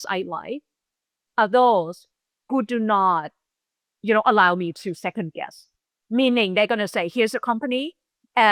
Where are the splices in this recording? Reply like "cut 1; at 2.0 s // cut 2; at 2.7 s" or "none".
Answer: none